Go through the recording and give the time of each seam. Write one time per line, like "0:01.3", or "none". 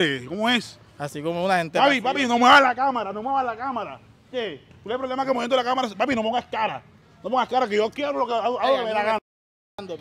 none